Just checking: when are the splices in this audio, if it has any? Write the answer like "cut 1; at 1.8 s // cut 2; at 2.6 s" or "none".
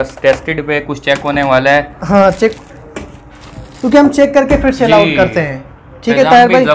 none